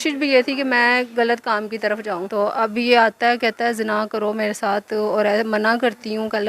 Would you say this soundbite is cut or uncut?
cut